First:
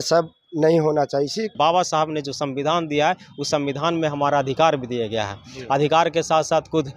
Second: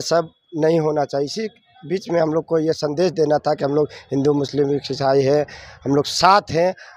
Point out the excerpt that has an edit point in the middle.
first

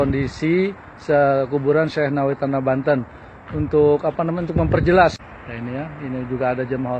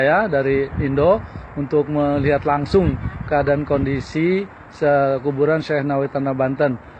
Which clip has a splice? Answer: first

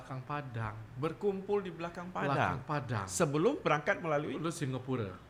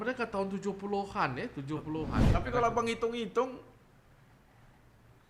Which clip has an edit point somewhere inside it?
second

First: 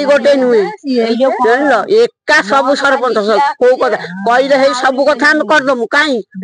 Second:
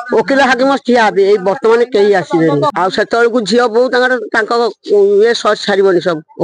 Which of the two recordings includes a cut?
second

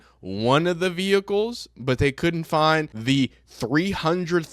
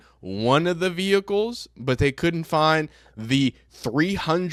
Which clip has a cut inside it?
first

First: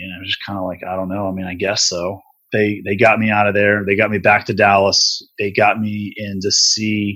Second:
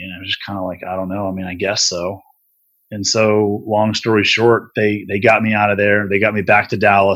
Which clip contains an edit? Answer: first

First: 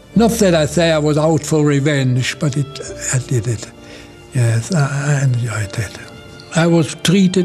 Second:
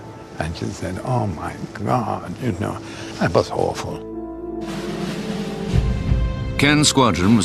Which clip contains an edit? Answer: first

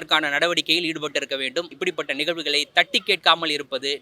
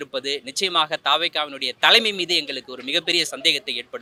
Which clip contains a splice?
first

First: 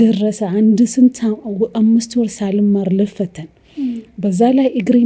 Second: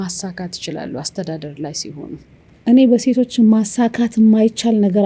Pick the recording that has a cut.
second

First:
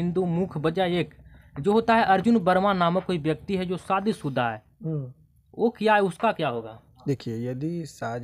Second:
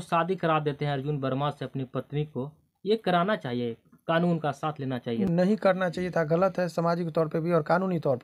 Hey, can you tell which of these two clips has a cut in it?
second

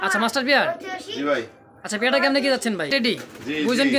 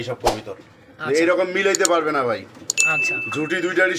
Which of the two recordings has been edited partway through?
first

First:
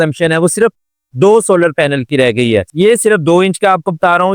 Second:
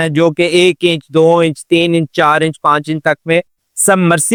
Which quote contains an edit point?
first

